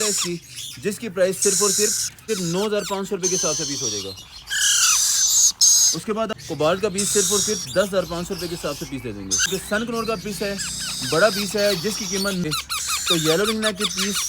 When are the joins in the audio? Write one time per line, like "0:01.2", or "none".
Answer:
0:02.2
0:06.3
0:09.5
0:12.4